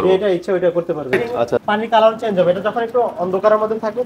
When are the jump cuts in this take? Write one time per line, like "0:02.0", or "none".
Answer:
0:01.6